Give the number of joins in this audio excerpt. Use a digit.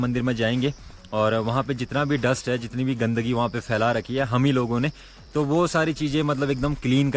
0